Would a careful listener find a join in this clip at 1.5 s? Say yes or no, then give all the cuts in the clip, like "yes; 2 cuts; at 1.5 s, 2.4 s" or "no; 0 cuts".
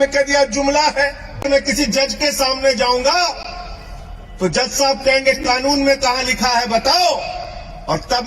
yes; 1 cut; at 1.5 s